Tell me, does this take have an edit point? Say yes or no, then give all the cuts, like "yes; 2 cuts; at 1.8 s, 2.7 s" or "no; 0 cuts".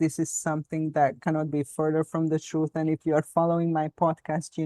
no; 0 cuts